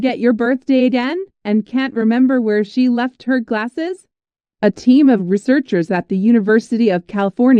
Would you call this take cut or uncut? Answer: uncut